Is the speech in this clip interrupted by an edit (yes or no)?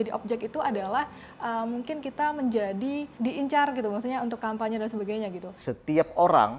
yes